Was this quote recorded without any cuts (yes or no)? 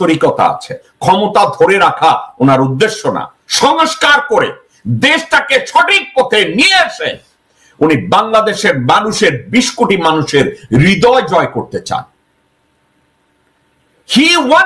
yes